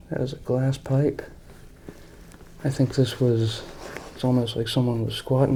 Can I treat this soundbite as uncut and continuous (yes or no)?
yes